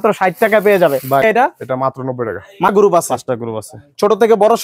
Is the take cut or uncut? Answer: cut